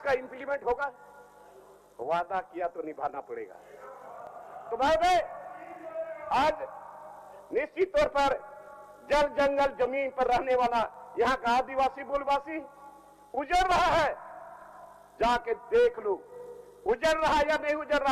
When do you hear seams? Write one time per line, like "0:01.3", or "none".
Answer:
none